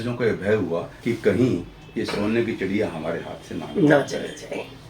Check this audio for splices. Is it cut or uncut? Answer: cut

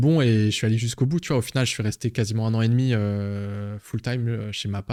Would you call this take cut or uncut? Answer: uncut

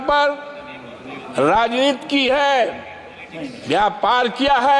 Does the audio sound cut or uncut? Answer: uncut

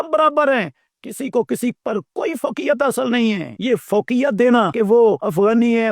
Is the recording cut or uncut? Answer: cut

